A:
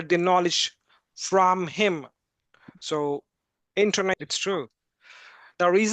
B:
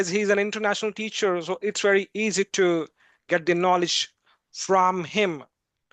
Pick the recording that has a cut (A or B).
A